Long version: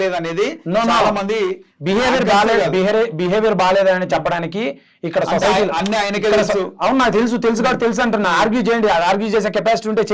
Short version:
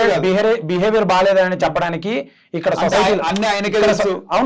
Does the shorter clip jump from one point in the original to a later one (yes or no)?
no